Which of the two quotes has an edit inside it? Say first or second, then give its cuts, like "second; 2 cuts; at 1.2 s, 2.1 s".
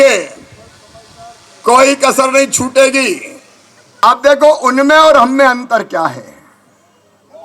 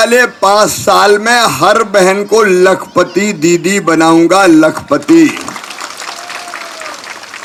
first; 1 cut; at 4.0 s